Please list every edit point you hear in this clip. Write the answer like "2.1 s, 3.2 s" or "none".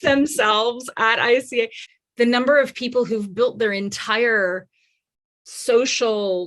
1.8 s